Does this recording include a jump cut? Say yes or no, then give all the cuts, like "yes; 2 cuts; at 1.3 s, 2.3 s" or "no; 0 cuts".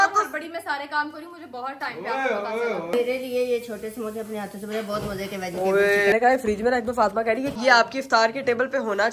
yes; 3 cuts; at 2.9 s, 6.1 s, 7.5 s